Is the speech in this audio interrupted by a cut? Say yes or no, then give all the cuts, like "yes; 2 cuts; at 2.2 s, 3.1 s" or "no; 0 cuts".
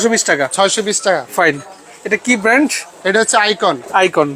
no; 0 cuts